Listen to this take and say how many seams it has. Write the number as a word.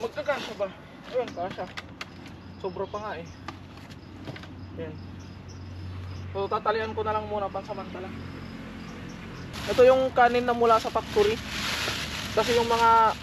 one